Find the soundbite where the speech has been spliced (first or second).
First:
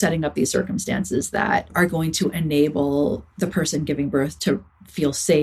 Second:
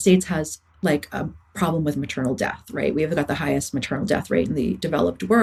first